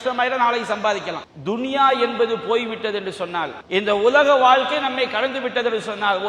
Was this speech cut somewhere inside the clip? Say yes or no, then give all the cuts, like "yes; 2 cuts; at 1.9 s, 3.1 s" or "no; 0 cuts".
yes; 2 cuts; at 1.2 s, 3.6 s